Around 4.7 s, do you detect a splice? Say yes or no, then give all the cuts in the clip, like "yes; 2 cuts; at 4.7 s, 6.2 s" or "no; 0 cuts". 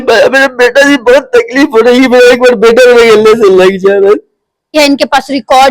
yes; 1 cut; at 4.7 s